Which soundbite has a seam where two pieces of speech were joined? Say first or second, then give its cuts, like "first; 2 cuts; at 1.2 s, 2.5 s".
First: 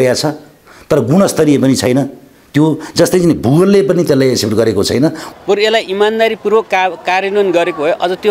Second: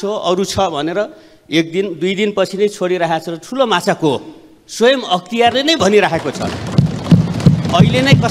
first; 1 cut; at 5.2 s